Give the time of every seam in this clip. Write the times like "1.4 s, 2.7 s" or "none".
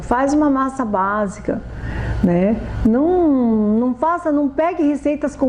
none

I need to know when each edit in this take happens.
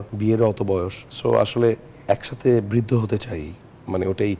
none

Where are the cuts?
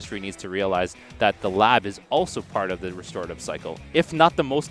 none

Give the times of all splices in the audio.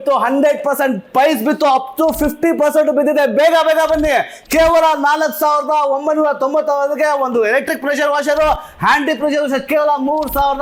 none

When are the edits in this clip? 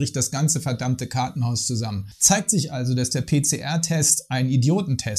2.1 s

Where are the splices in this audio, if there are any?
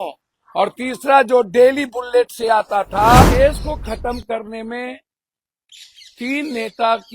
3.2 s

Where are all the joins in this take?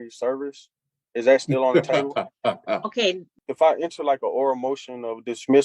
3.3 s

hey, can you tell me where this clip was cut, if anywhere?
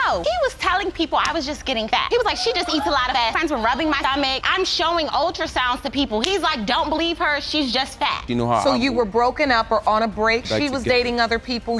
8.3 s

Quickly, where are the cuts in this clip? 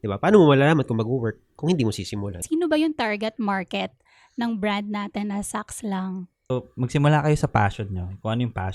2.4 s, 6.4 s

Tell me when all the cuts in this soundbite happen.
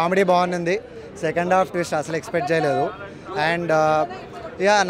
none

